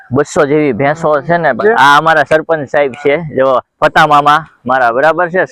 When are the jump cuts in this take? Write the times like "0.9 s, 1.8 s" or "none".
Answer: 1.6 s